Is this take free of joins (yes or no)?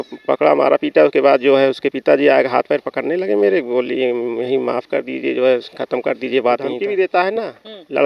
no